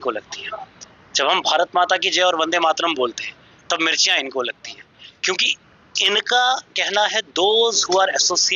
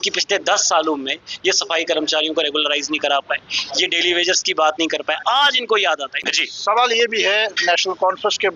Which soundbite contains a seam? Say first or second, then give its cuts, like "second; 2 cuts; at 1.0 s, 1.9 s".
second; 1 cut; at 6.2 s